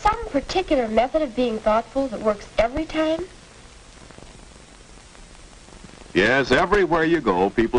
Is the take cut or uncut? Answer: uncut